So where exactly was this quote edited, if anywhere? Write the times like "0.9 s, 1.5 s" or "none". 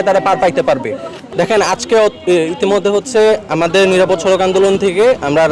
none